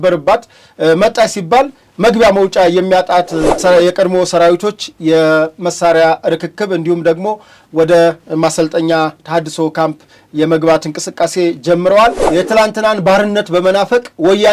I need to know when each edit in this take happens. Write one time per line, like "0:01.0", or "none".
0:03.6
0:12.2